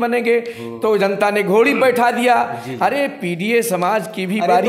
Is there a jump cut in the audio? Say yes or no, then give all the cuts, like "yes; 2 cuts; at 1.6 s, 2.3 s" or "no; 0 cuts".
no; 0 cuts